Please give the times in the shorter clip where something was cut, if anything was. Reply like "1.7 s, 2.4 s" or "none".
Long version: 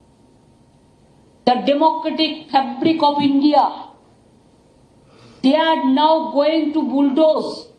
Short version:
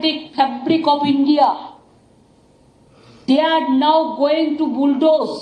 none